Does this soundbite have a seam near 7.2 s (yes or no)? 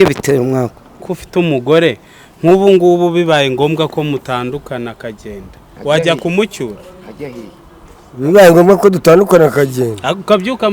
no